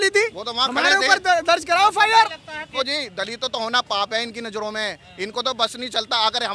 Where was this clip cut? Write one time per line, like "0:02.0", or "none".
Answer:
0:02.7